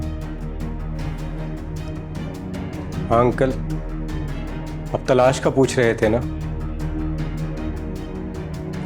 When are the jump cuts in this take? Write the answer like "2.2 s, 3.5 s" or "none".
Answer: none